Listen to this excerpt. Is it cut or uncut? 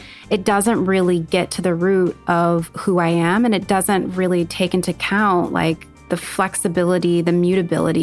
cut